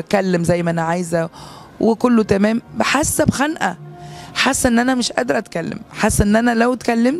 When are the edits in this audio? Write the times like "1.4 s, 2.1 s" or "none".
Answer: none